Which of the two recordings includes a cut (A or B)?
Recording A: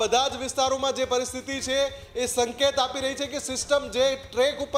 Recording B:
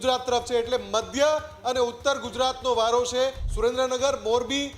B